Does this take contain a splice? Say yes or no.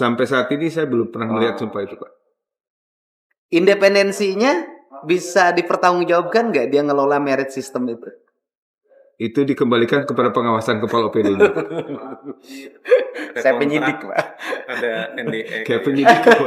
no